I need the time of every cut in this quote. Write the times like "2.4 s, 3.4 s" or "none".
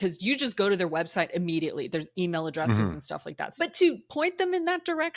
3.4 s